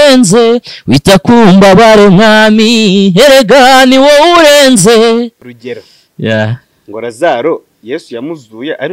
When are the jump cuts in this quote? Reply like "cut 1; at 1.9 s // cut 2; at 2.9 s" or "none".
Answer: cut 1; at 5.5 s

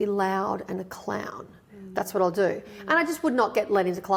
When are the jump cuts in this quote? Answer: none

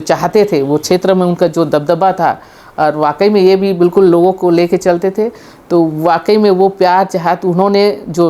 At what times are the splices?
none

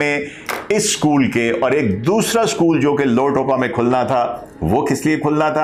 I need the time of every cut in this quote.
none

